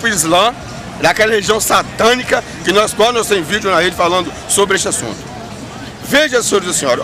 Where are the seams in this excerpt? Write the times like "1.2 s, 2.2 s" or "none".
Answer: none